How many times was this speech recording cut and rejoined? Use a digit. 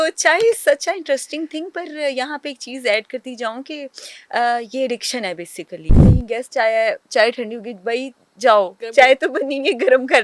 2